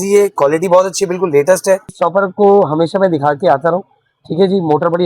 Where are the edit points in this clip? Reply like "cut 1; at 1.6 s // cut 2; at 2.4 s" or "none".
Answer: cut 1; at 1.9 s